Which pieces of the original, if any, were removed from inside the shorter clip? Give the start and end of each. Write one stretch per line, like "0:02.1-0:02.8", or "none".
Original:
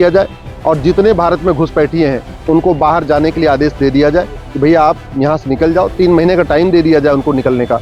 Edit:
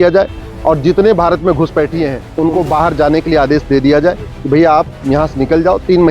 0:02.2-0:02.3